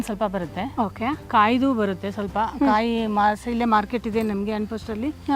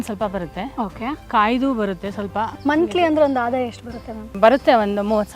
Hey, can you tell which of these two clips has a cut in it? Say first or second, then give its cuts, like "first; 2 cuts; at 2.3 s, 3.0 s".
second; 2 cuts; at 2.5 s, 4.4 s